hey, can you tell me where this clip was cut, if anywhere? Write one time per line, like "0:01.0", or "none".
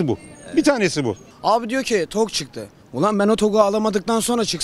0:01.3